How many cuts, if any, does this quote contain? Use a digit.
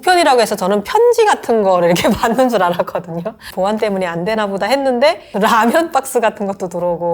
2